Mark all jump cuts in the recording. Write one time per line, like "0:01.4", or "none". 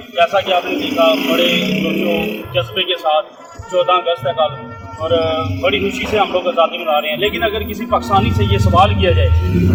none